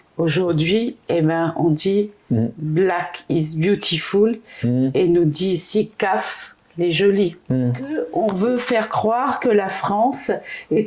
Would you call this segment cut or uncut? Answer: cut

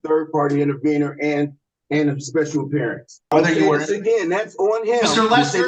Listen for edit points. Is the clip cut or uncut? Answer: cut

